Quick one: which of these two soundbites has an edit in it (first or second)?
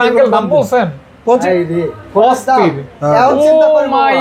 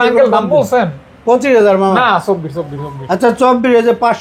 first